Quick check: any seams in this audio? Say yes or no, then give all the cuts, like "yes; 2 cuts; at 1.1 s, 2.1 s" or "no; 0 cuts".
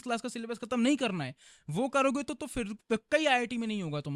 no; 0 cuts